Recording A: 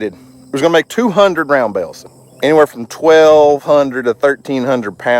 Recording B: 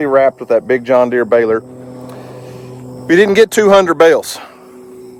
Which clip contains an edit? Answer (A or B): A